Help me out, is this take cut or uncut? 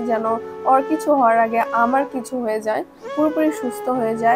cut